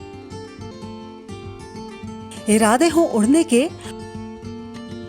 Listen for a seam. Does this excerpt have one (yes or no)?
yes